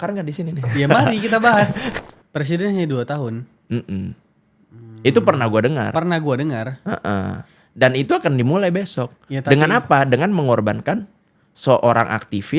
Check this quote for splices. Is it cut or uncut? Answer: cut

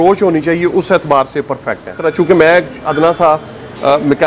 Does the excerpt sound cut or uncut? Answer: cut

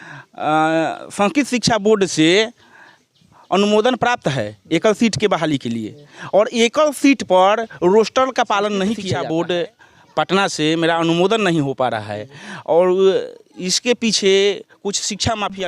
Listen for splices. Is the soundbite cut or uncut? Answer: cut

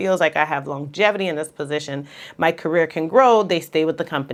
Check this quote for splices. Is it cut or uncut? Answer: uncut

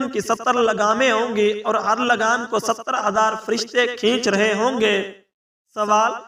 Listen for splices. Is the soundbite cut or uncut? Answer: uncut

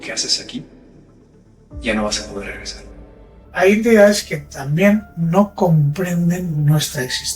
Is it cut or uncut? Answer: cut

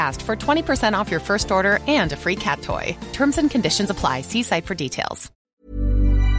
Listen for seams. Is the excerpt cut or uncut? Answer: cut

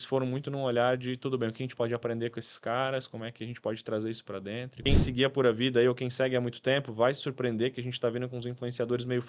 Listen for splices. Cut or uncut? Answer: cut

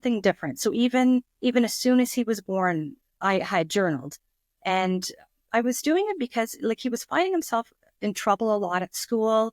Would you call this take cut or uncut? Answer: uncut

